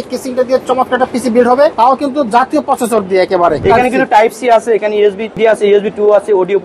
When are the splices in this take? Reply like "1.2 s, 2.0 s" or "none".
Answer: 1.7 s, 3.6 s, 5.3 s